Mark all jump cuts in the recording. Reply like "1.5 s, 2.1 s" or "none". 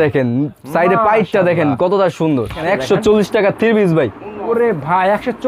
2.6 s